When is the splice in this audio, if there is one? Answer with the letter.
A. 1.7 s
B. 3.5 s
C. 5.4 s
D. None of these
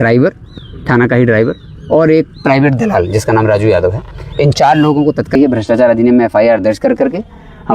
C